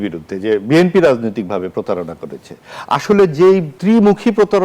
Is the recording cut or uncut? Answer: cut